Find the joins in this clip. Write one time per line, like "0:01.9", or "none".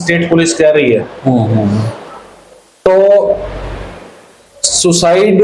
none